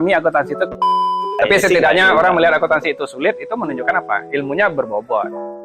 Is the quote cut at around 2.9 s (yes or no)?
no